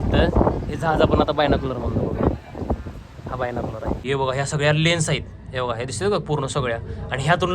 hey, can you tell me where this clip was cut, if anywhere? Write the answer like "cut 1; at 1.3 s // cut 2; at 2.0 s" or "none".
cut 1; at 4.0 s